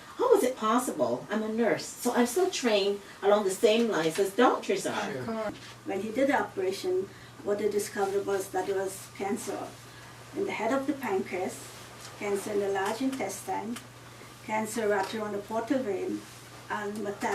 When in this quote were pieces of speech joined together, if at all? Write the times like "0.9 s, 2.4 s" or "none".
5.6 s

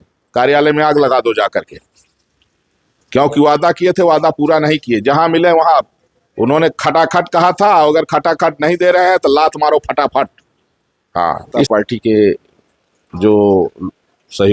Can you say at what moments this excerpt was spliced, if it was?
11.7 s

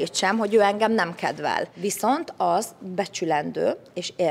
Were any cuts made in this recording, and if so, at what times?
1.7 s

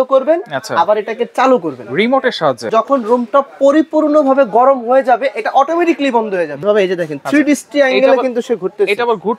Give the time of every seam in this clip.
2.7 s, 6.6 s

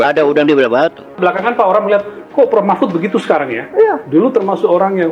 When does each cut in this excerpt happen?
1.1 s

